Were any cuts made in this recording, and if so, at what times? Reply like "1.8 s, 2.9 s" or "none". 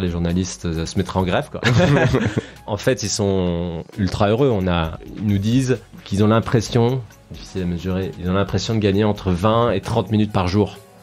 0.9 s, 2.7 s, 5.0 s, 6.0 s